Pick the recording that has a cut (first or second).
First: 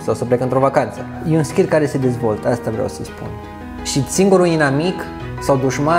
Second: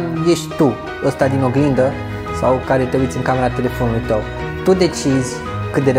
first